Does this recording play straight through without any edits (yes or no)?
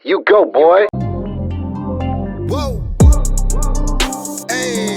no